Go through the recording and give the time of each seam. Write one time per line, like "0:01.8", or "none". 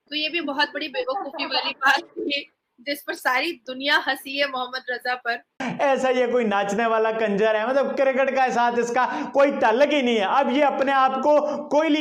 0:05.6